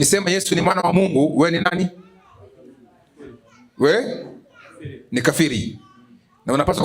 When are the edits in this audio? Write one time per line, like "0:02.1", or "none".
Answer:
none